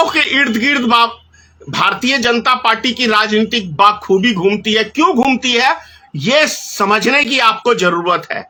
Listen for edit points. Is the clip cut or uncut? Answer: uncut